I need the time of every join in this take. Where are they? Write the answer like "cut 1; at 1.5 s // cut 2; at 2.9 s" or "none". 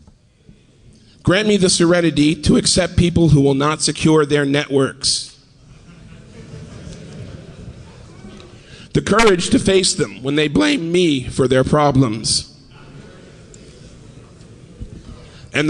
cut 1; at 8.6 s